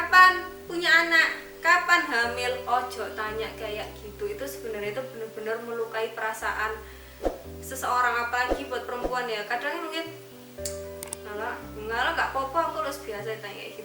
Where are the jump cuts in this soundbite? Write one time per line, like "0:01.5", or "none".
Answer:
none